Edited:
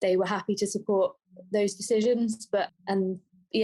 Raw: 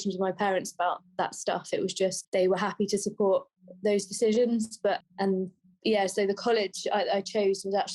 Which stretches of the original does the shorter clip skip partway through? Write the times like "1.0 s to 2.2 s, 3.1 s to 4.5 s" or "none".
none